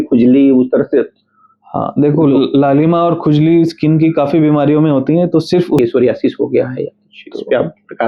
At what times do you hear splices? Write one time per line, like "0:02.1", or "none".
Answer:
0:05.8

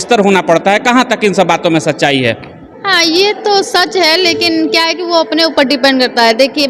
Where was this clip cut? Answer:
none

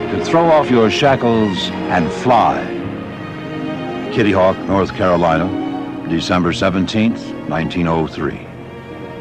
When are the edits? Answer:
0:07.3

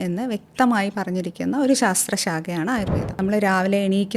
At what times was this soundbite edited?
0:03.2

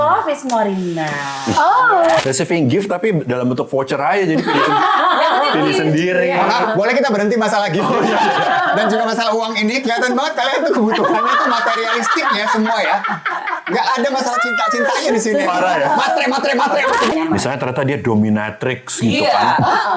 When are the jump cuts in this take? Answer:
0:02.2
0:17.1

